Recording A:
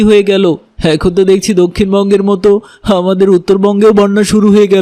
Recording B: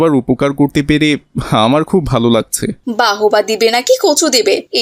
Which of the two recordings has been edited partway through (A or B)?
B